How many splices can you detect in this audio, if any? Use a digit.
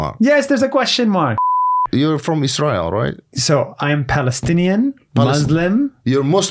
1